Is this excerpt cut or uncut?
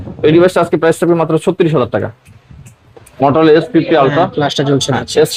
uncut